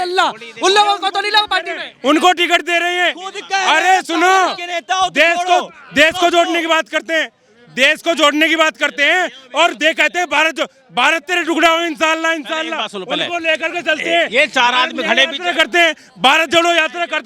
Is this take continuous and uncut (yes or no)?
yes